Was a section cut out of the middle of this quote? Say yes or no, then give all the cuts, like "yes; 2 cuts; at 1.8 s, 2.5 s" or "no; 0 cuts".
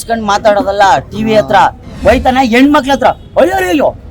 yes; 1 cut; at 1.9 s